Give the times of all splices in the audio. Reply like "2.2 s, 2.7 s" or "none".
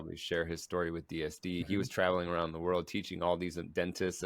1.6 s